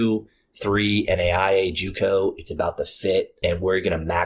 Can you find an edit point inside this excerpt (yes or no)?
yes